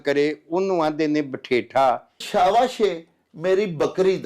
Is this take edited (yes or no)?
yes